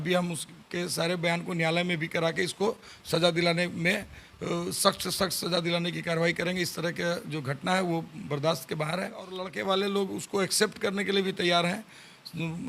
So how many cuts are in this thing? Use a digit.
1